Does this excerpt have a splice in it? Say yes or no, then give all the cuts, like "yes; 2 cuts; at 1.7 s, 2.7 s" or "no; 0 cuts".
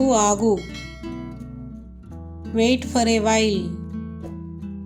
yes; 1 cut; at 3.6 s